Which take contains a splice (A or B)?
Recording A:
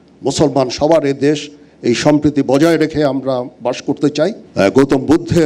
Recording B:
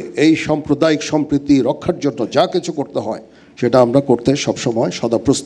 A